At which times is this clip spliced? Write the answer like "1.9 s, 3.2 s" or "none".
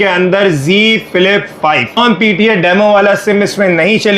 2.0 s